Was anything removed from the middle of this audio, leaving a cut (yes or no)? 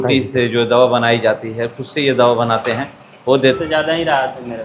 yes